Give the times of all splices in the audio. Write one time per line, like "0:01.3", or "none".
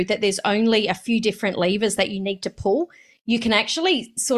none